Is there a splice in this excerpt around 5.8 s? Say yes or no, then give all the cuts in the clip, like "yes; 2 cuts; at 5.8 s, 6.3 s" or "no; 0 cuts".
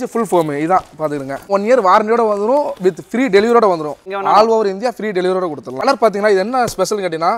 yes; 3 cuts; at 1.5 s, 4.0 s, 5.8 s